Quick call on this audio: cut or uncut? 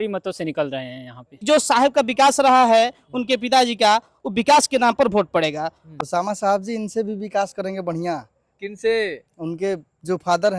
cut